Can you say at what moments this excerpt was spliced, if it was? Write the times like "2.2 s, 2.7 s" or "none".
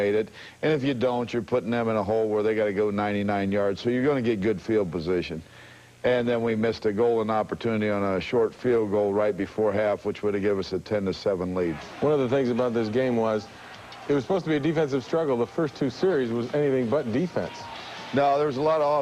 14.7 s